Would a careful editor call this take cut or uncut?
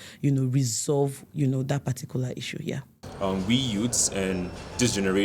cut